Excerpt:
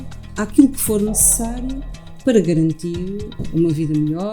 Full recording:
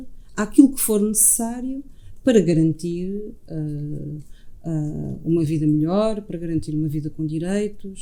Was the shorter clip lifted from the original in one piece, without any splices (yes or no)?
no